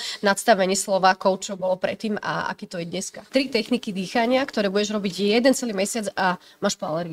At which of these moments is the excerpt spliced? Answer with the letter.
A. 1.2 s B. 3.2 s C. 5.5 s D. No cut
B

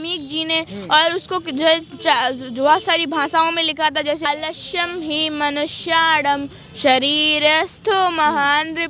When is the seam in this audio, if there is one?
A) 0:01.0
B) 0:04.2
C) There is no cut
B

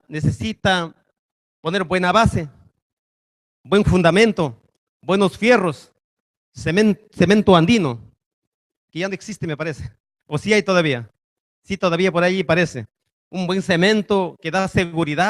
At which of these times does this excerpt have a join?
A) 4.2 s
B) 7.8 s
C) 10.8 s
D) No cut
B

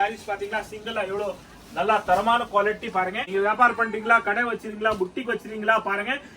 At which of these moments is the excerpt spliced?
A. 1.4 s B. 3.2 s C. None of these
B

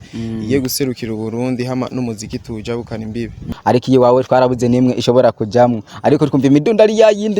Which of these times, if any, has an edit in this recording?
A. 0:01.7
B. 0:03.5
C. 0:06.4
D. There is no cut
B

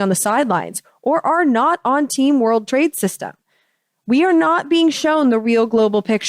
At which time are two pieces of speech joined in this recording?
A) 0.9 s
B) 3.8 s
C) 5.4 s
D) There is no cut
D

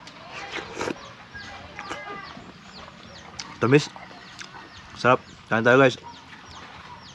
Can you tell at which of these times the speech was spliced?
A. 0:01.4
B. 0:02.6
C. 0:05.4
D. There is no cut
D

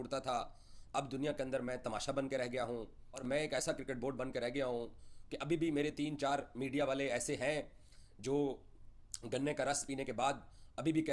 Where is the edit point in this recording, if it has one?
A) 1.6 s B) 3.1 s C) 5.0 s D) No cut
B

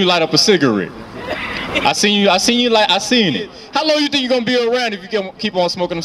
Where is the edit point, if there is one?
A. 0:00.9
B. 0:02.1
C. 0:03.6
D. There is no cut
C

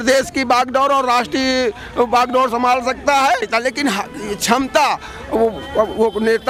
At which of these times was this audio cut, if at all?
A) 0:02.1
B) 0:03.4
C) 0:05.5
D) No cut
D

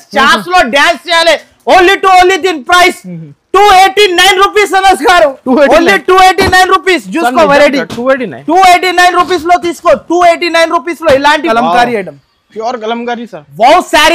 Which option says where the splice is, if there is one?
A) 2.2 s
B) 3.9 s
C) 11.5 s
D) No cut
C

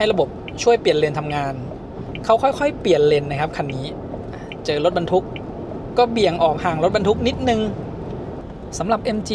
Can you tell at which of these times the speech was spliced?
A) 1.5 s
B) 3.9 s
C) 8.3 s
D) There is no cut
C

